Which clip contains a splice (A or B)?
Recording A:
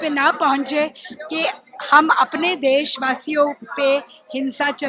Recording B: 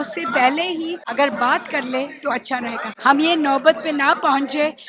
B